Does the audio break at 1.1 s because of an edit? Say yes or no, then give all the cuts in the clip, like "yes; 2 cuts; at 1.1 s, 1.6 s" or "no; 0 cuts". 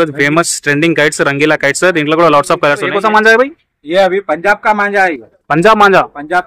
no; 1 cut; at 2.9 s